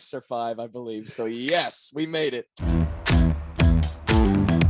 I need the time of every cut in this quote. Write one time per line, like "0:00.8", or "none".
0:02.6

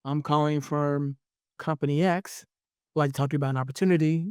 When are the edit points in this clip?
0:02.7

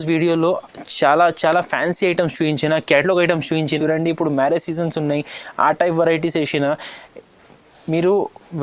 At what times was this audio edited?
0:03.8

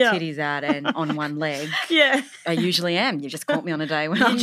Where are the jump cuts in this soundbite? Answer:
0:02.3

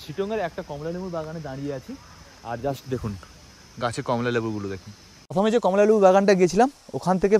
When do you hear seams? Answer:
0:05.3

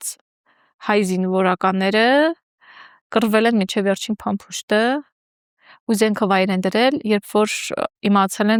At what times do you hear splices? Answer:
none

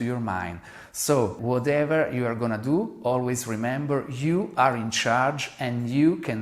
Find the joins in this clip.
0:01.4

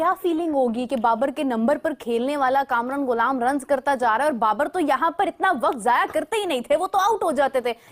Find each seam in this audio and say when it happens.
none

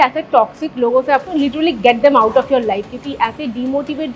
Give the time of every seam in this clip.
0:01.3

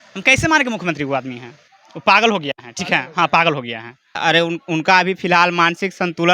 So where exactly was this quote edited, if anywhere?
none

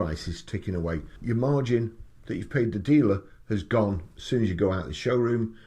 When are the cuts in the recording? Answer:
0:01.1

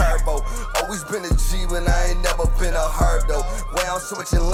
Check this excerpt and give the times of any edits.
none

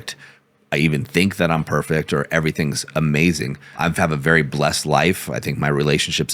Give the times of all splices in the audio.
0:03.8

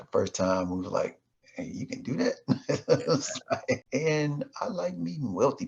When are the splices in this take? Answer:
0:03.8

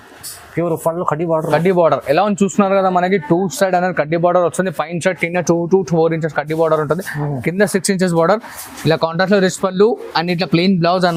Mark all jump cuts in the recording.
none

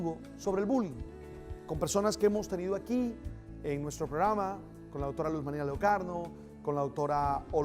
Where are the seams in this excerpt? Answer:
0:01.9

